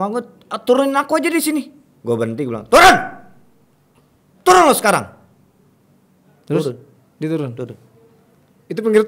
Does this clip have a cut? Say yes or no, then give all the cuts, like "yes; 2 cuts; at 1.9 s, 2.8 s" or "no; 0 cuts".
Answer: no; 0 cuts